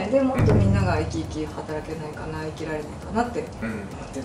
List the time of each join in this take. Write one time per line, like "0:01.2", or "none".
none